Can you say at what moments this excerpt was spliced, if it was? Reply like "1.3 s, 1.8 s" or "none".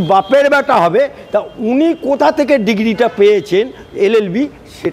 none